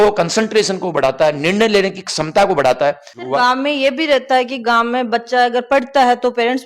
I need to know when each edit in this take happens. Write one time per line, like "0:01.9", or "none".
0:03.1